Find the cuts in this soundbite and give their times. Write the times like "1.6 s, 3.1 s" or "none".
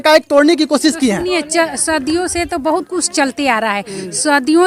none